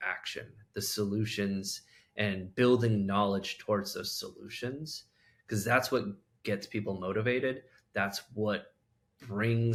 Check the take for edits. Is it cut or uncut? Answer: uncut